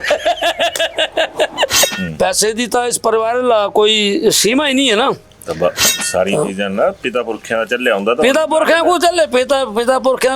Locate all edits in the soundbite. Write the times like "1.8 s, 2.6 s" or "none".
2.0 s